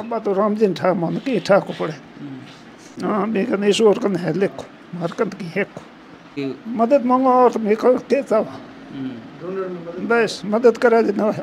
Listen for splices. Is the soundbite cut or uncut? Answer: cut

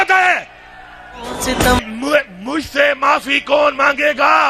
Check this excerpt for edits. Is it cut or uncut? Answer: cut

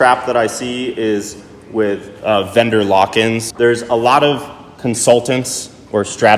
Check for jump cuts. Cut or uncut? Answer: cut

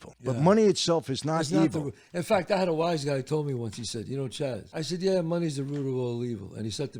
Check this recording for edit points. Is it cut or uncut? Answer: uncut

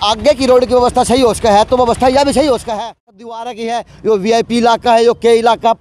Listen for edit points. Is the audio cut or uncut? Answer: cut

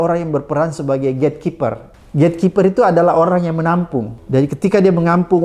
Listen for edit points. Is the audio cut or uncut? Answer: cut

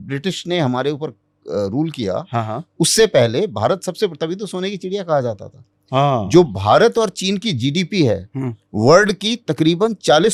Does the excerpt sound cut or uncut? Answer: uncut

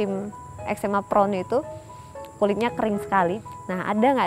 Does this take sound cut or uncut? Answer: cut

